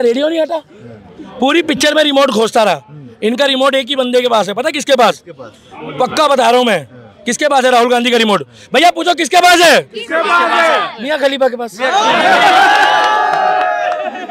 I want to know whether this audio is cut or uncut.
uncut